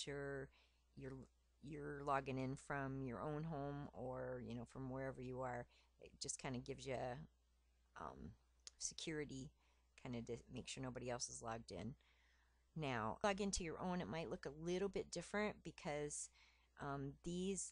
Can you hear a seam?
yes; 1 cut; at 13.2 s

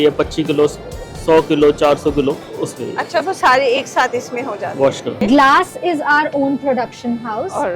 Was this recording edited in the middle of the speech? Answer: yes; 2 cuts; at 2.5 s, 5.2 s

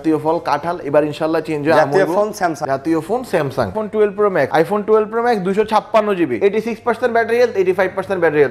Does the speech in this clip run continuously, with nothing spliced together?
no; 4 cuts; at 2.6 s, 3.7 s, 4.5 s, 6.3 s

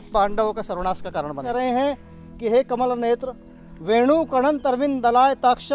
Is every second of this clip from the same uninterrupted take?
no; 1 cut; at 1.5 s

